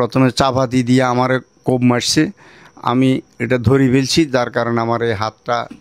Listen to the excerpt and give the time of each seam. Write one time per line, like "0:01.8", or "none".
none